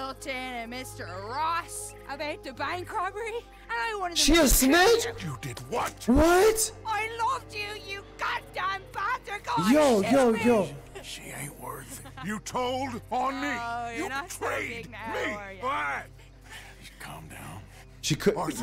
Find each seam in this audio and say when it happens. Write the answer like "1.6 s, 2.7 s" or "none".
none